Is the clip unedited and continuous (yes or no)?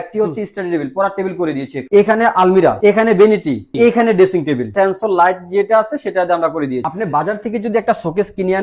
no